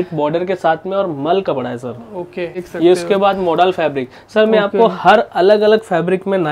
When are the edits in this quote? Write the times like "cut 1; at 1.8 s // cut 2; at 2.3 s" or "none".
cut 1; at 2.6 s